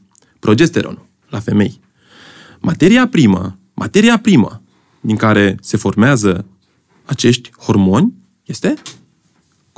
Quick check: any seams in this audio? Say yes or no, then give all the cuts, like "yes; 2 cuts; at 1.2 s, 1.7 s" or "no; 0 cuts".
no; 0 cuts